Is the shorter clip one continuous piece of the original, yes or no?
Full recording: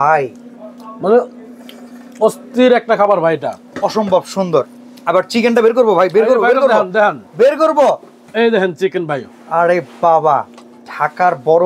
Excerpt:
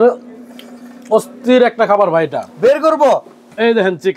no